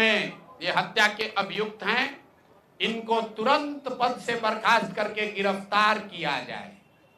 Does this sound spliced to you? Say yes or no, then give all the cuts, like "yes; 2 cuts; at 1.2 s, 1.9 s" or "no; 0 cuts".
no; 0 cuts